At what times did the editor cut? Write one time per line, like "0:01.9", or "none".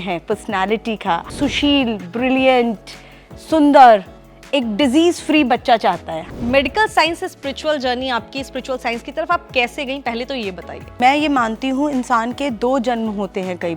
0:01.3
0:06.1
0:10.9